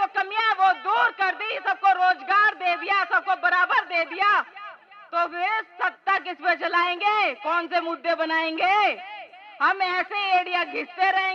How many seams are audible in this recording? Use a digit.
0